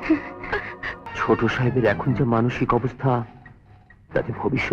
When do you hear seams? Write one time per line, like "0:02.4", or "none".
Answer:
0:01.1

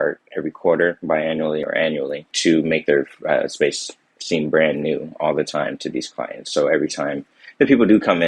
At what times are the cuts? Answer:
0:02.3

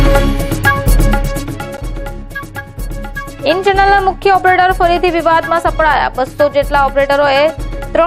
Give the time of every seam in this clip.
0:00.9

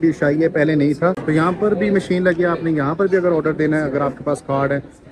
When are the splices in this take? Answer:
0:01.2

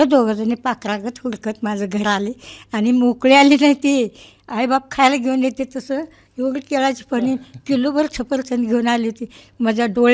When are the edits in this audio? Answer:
none

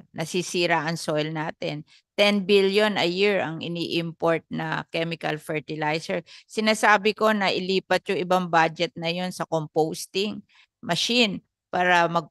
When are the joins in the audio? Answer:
none

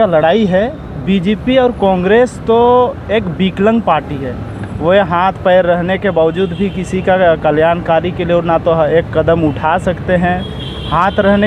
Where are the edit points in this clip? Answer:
none

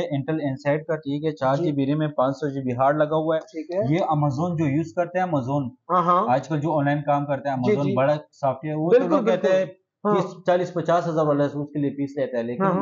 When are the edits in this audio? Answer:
none

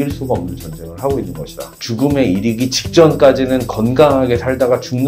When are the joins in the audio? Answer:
0:01.8

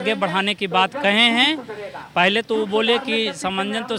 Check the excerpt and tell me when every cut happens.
none

